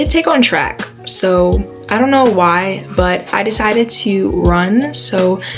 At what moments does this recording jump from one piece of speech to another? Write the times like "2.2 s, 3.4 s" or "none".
none